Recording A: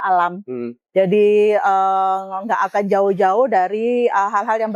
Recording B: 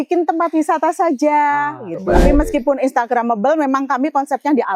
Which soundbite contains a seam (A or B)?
B